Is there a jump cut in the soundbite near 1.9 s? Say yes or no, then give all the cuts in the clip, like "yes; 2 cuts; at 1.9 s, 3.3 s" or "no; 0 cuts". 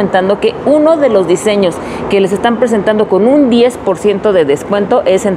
no; 0 cuts